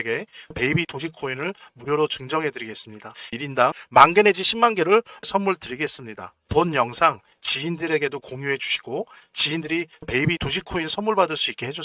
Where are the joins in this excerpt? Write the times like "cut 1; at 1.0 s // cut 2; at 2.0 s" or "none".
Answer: cut 1; at 3.3 s